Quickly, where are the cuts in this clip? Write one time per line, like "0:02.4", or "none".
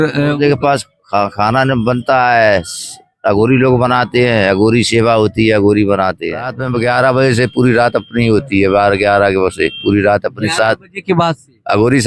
0:06.6